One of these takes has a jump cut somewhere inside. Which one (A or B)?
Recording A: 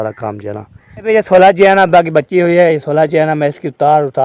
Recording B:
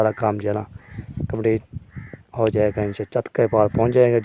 A